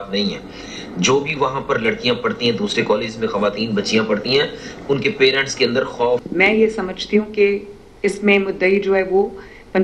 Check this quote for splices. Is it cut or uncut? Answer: cut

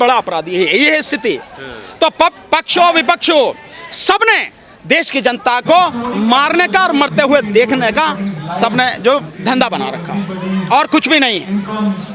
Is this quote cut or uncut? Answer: uncut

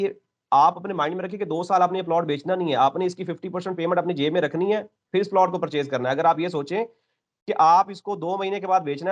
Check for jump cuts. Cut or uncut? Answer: uncut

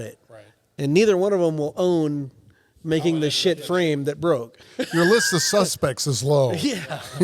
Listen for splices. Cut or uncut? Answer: cut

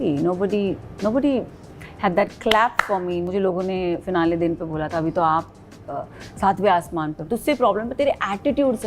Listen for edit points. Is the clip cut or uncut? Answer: cut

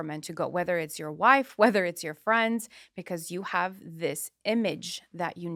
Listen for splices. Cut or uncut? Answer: uncut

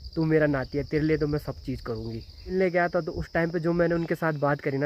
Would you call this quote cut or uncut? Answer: cut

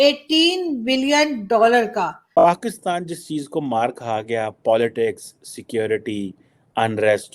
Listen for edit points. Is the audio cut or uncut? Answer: cut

